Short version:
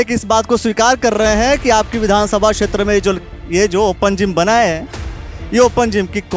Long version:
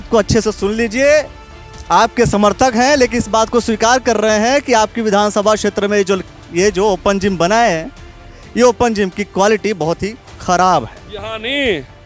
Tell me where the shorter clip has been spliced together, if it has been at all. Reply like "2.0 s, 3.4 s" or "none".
none